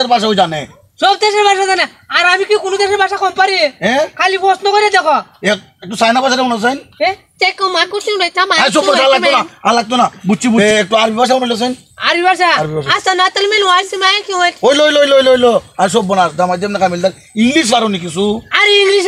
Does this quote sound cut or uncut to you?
cut